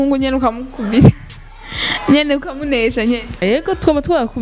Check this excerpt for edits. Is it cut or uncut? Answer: cut